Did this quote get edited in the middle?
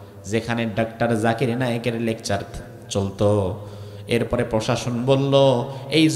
no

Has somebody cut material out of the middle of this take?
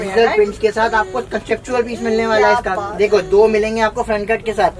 no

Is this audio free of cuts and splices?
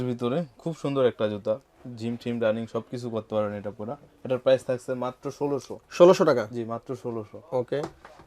yes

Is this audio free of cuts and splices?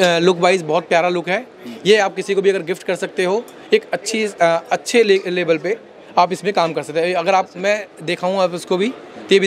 yes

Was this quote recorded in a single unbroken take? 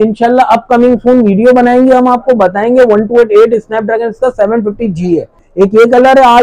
no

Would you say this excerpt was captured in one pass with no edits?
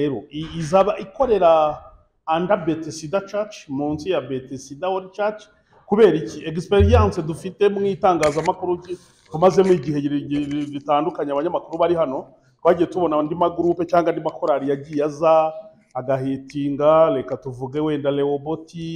yes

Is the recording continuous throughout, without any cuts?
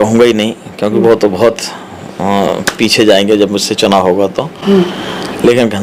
yes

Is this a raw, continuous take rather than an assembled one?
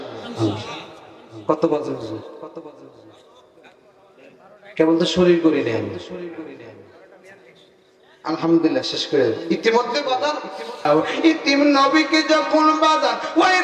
no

